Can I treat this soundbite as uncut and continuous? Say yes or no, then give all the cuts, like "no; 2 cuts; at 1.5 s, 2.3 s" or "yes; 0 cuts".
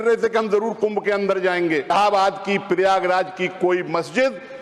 no; 1 cut; at 1.9 s